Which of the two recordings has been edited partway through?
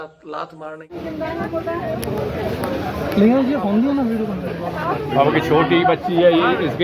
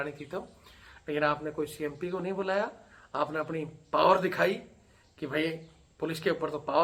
first; 1 cut; at 1.0 s

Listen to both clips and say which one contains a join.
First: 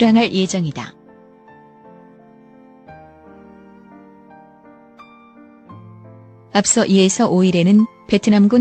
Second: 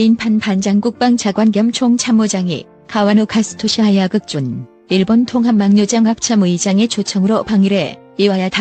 first; 2 cuts; at 0.9 s, 6.1 s

